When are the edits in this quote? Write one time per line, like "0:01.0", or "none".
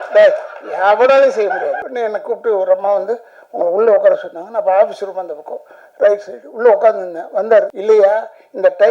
0:01.8
0:07.7